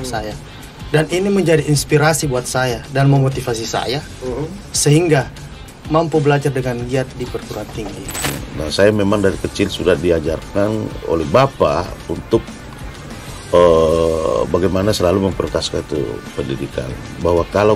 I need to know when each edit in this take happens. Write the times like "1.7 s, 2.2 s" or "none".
8.3 s